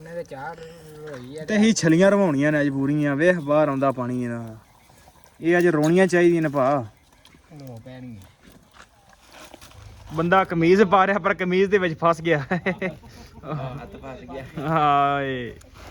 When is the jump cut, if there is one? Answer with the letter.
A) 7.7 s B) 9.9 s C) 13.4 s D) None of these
B